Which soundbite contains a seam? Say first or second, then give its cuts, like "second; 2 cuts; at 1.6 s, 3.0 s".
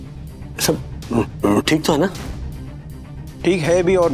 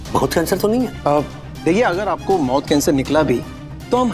second; 1 cut; at 1.0 s